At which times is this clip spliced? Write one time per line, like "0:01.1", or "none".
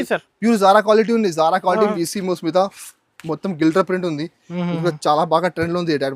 0:01.9